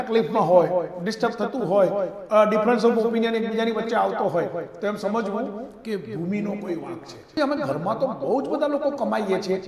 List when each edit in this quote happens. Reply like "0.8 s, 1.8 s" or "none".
7.4 s